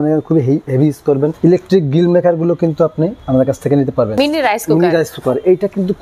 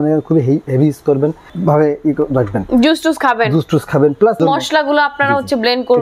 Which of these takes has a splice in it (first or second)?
first